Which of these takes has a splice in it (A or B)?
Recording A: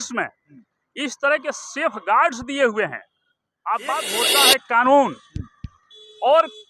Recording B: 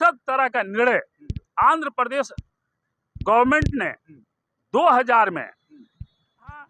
A